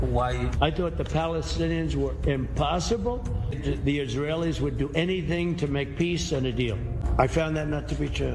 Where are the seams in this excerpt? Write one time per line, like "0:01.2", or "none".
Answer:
0:03.6
0:07.0